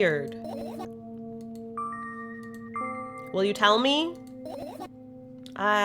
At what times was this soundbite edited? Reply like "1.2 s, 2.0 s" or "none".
none